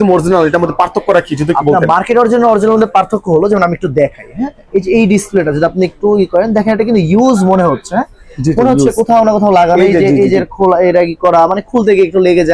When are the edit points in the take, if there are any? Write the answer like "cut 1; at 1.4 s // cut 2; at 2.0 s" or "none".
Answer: none